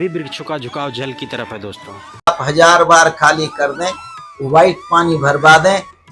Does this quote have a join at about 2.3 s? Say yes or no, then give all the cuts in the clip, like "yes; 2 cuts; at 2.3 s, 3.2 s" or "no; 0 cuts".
yes; 1 cut; at 2.3 s